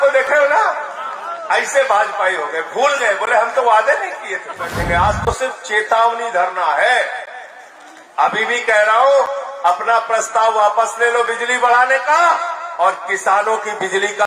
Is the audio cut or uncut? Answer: cut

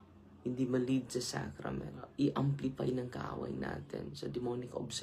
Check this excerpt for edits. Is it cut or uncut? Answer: cut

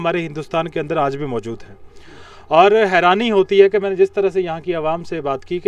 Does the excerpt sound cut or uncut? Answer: uncut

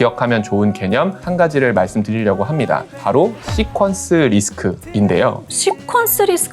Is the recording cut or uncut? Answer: cut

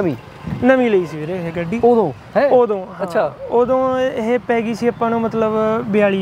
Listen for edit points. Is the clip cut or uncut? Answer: uncut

